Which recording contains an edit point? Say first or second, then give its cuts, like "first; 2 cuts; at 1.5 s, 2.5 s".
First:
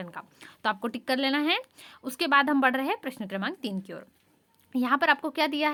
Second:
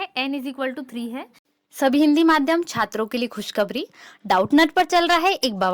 second; 1 cut; at 1.5 s